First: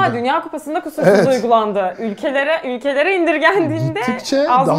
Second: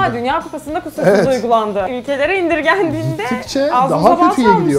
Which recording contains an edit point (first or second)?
second